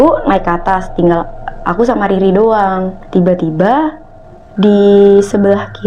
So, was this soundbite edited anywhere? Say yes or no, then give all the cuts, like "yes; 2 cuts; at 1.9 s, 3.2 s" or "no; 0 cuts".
yes; 1 cut; at 3.0 s